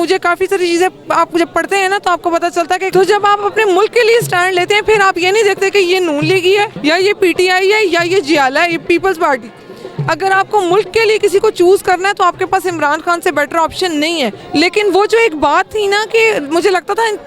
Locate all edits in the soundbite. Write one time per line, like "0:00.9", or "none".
0:02.9
0:06.7
0:14.4